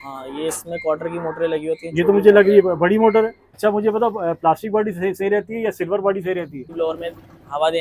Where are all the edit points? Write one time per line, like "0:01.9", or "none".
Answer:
0:03.4
0:06.7